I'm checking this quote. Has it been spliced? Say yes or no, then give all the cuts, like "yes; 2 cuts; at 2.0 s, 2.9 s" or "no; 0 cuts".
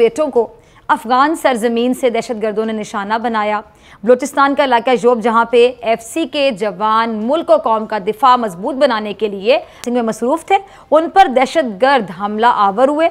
no; 0 cuts